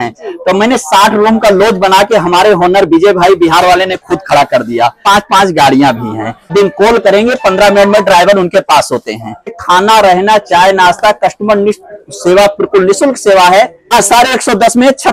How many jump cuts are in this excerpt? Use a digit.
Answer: 4